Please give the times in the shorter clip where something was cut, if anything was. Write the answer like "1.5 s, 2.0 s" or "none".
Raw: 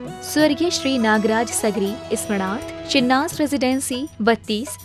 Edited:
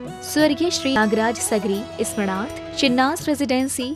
1.0 s